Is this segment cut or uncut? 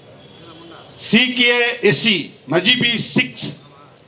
uncut